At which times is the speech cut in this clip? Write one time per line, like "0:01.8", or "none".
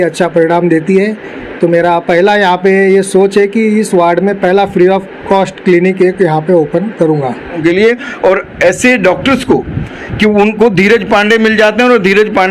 0:07.6